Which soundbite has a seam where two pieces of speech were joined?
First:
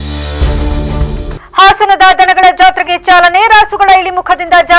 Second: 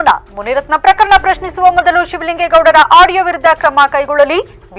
first; 1 cut; at 1.3 s

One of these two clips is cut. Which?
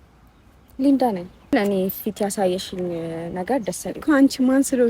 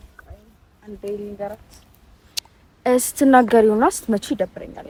first; 1 cut; at 1.5 s

